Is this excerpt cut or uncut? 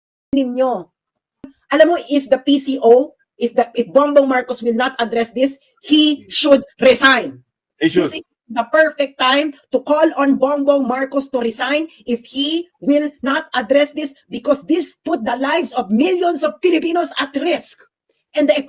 cut